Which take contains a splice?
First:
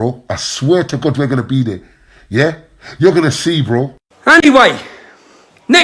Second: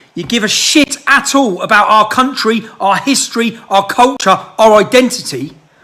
first; 1 cut; at 4.0 s

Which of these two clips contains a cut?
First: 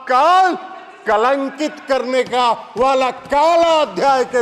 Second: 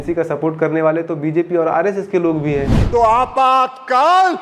second; 1 cut; at 2.8 s

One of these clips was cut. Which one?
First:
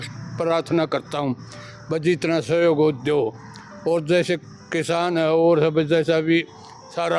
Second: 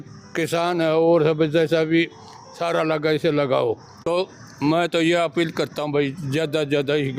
second; 1 cut; at 3.9 s

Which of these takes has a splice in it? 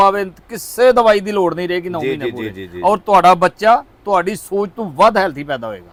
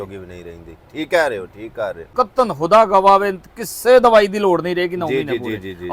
second; 1 cut; at 2.1 s

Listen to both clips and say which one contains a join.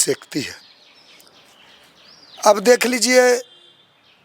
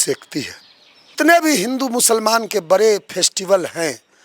second; 1 cut; at 1.1 s

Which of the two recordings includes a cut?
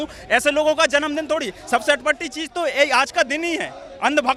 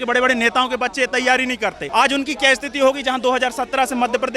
second; 1 cut; at 1.8 s

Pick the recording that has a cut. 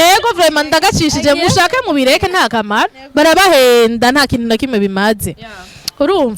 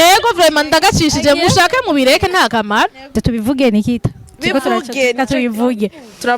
second; 1 cut; at 3.1 s

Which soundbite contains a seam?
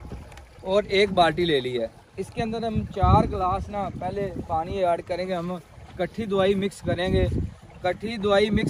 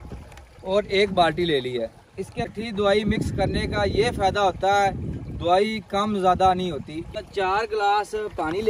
second; 2 cuts; at 2.5 s, 7.1 s

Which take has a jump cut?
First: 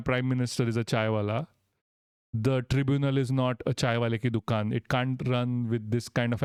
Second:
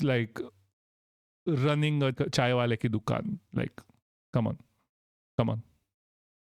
second; 1 cut; at 2.2 s

